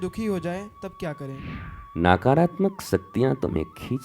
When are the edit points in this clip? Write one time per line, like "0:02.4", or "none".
0:01.5